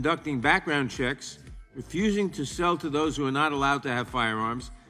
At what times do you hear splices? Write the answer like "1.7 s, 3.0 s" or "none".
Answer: none